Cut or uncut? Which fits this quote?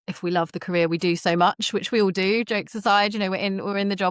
uncut